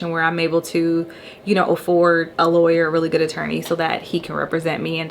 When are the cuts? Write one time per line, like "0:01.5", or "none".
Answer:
0:02.3